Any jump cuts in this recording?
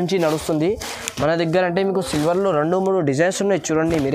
no; 0 cuts

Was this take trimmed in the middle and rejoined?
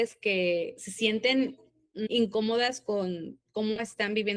yes; 1 cut; at 2.1 s

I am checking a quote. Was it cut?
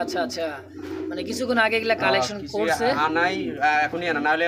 no; 0 cuts

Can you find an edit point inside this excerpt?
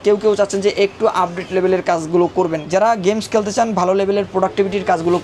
yes; 1 cut; at 2.6 s

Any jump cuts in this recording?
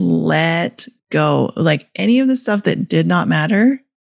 yes; 1 cut; at 0.9 s

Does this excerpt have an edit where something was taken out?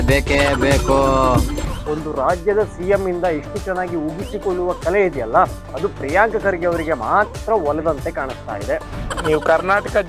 yes; 1 cut; at 1.6 s

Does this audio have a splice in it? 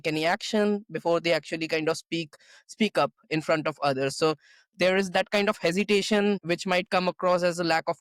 no; 0 cuts

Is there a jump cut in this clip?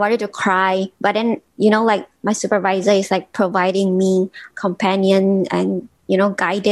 yes; 2 cuts; at 1.5 s, 4.5 s

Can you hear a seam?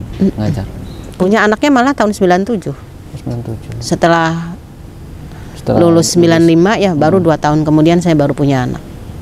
yes; 1 cut; at 1.1 s

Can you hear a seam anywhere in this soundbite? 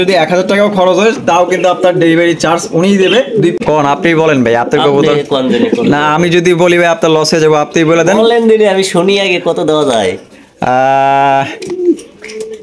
yes; 1 cut; at 3.6 s

